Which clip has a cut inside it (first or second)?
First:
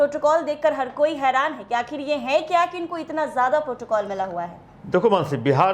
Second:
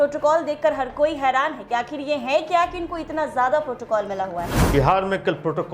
second